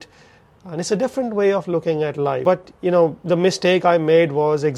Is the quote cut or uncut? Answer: cut